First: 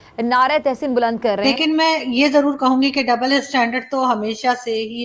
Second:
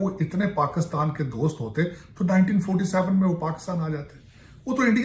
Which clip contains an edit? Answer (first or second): first